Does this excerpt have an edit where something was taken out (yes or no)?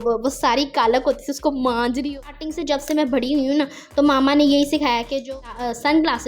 yes